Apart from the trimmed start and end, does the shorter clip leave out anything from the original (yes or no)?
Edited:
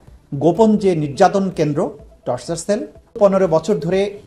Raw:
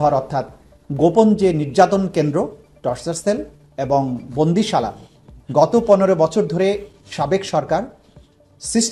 yes